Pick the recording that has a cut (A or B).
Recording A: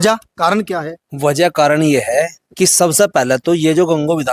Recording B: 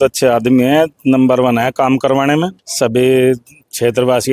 B